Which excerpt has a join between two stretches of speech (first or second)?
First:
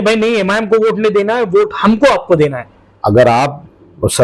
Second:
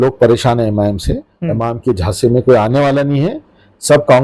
second